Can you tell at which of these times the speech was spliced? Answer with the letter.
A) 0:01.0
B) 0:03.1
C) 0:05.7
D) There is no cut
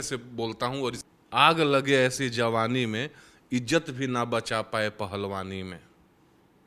A